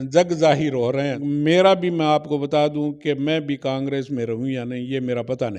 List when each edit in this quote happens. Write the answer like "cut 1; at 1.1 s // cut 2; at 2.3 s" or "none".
cut 1; at 1.2 s

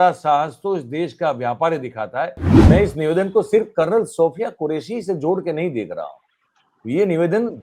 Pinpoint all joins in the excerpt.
cut 1; at 2.5 s

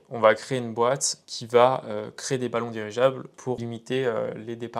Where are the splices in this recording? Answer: cut 1; at 3.6 s

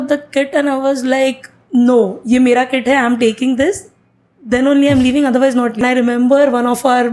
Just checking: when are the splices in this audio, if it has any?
cut 1; at 5.8 s

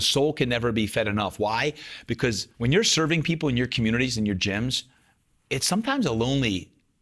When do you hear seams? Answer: cut 1; at 2.5 s

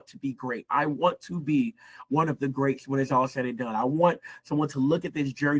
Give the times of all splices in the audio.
none

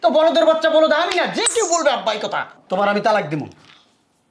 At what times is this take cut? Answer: cut 1; at 2.6 s

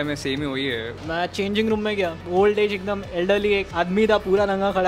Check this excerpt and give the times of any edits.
cut 1; at 1.0 s // cut 2; at 2.2 s

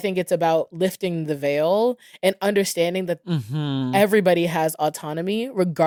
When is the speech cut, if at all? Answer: none

